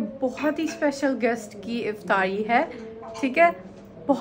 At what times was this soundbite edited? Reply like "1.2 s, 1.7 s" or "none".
none